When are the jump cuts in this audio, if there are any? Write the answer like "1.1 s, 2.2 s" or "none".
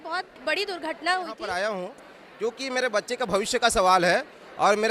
1.5 s